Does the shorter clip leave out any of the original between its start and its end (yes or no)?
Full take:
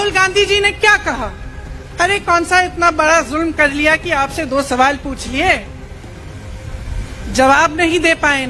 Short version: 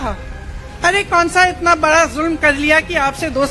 no